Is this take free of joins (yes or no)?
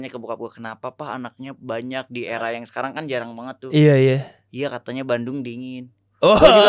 yes